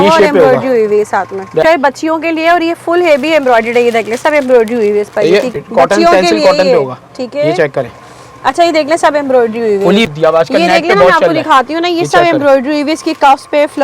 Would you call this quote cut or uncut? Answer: cut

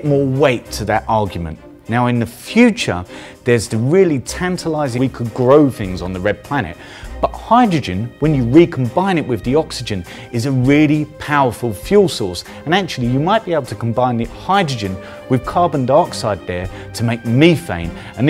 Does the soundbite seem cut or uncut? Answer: uncut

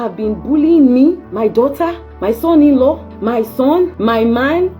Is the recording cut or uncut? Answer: cut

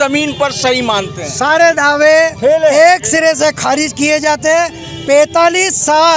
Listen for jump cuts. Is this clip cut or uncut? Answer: uncut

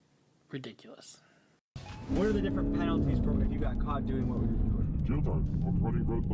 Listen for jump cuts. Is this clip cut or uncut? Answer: cut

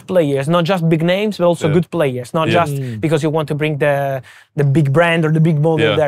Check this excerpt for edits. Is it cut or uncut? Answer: uncut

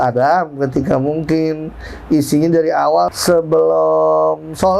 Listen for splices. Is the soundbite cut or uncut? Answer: cut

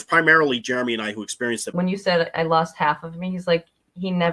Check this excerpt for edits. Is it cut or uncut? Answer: cut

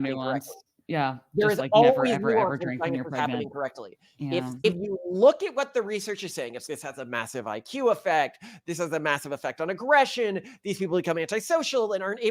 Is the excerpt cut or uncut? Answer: cut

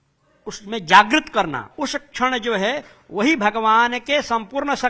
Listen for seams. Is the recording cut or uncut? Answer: cut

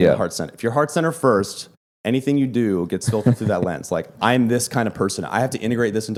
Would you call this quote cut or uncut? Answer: uncut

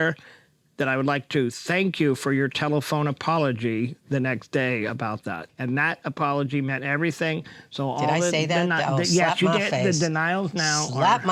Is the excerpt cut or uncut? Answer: uncut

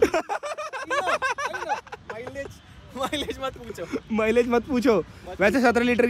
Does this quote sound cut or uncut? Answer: uncut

